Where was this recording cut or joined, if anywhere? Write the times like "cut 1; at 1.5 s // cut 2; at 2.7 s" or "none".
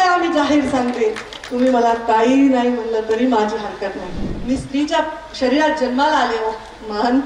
cut 1; at 4.3 s